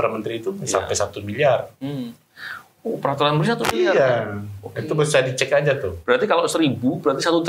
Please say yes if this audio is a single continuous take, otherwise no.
yes